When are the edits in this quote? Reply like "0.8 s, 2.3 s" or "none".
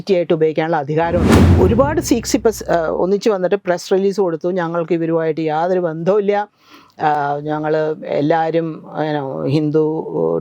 1.4 s